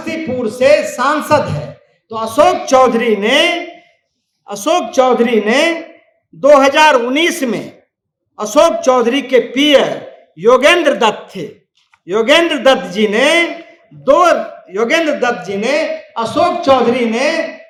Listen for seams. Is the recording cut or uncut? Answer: uncut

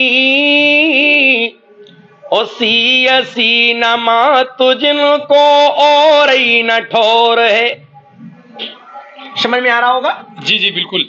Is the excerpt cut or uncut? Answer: uncut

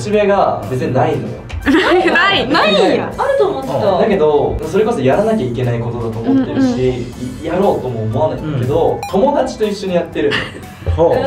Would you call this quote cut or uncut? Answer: uncut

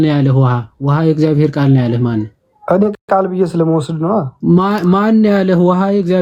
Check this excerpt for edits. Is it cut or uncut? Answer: uncut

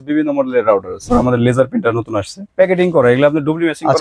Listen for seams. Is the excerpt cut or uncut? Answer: cut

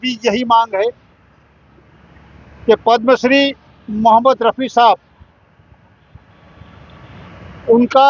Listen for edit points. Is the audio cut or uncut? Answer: cut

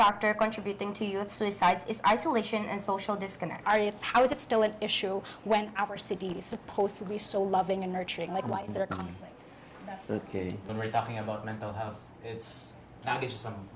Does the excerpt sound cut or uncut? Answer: cut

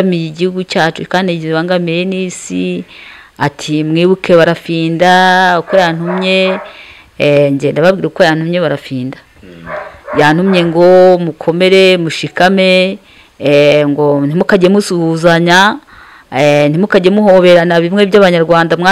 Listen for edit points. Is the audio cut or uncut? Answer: uncut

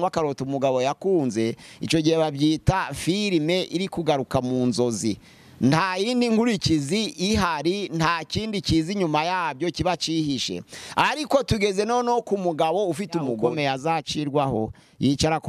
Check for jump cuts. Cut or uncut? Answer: cut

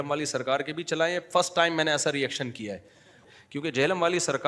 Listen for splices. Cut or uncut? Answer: cut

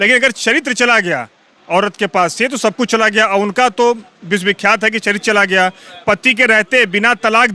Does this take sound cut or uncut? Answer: uncut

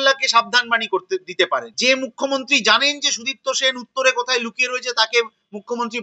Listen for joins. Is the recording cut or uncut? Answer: cut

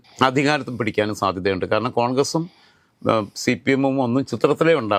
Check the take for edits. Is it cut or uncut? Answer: uncut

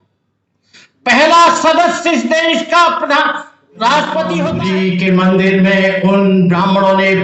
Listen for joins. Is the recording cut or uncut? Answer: cut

